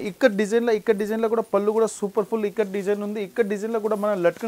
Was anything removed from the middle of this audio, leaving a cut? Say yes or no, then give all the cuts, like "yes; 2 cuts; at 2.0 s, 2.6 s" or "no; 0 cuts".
no; 0 cuts